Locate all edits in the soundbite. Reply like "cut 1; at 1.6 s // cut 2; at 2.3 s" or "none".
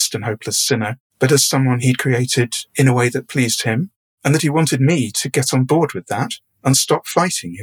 cut 1; at 1.0 s // cut 2; at 2.6 s